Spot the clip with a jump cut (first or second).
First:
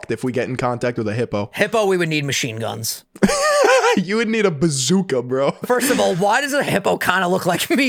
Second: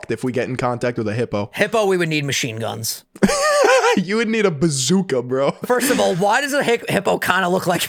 first